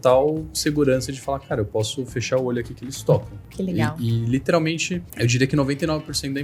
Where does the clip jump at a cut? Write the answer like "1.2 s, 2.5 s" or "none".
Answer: 3.4 s, 5.1 s